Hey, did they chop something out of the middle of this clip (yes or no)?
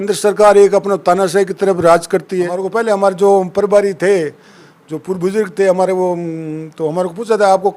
yes